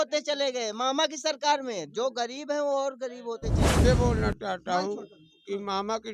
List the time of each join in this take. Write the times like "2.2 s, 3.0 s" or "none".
3.8 s